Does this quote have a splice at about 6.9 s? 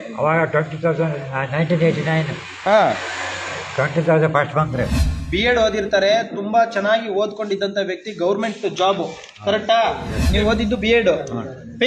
no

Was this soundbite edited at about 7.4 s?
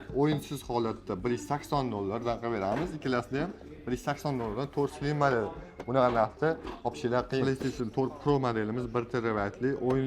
yes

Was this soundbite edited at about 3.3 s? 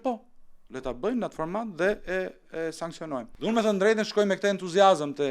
yes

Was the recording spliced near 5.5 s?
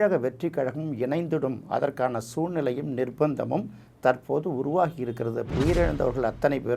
yes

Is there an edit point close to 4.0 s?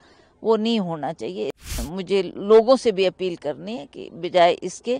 no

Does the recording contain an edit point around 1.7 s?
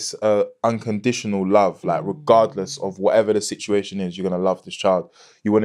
no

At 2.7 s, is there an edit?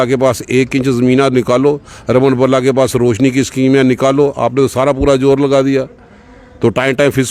no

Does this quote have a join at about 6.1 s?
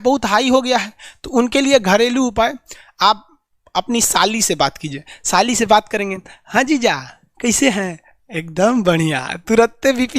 no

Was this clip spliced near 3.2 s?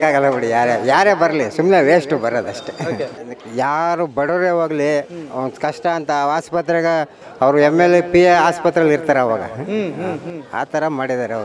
yes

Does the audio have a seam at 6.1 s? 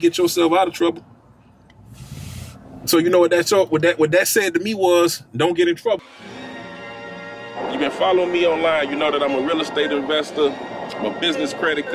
yes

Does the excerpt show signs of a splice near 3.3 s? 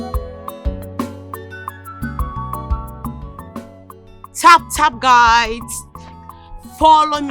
yes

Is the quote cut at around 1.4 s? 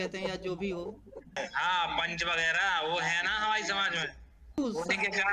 yes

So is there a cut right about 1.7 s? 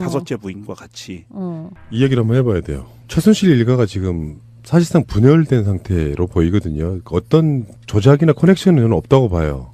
yes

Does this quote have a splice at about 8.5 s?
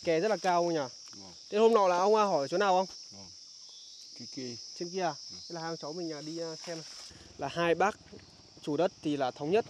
no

